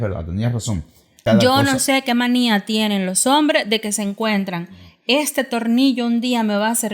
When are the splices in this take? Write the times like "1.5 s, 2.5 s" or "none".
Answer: 1.2 s